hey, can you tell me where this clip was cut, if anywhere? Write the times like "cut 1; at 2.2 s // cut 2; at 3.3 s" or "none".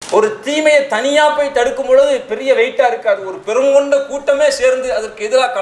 none